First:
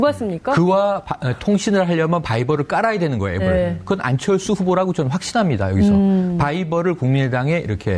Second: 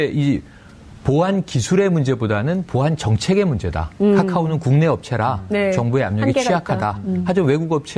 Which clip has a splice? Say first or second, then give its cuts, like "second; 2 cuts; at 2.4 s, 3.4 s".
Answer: first; 1 cut; at 4.4 s